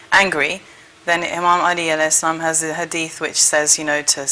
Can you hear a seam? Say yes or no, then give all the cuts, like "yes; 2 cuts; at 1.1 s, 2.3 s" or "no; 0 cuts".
no; 0 cuts